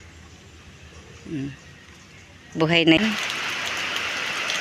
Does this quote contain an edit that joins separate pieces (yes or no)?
yes